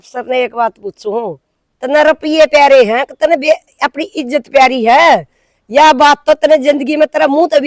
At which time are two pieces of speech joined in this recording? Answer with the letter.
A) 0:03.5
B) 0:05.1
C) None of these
C